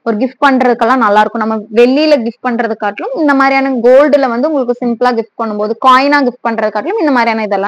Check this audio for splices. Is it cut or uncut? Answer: uncut